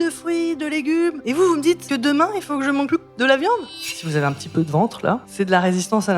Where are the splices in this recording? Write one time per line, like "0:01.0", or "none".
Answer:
0:01.2
0:01.8
0:02.9
0:03.7
0:05.3